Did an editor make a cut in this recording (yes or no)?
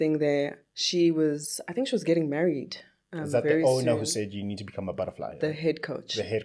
no